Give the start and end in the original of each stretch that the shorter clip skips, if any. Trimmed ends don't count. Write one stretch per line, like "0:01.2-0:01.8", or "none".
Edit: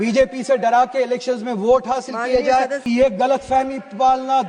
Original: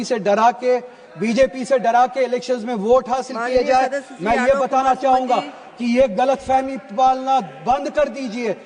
0:04.0-0:05.8